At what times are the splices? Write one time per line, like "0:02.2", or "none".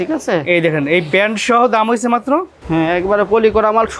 0:02.6